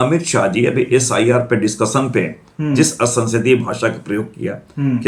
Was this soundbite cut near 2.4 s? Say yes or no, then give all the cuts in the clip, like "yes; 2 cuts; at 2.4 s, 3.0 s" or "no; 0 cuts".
no; 0 cuts